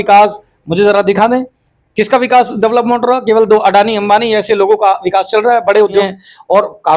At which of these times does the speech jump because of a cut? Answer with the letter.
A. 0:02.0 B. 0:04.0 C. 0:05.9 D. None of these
C